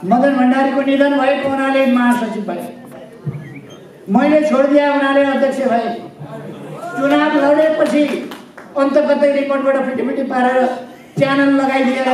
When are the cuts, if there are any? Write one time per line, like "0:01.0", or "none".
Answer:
none